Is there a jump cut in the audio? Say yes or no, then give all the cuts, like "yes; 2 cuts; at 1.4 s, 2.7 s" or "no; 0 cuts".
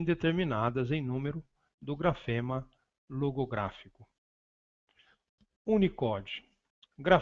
yes; 1 cut; at 2.6 s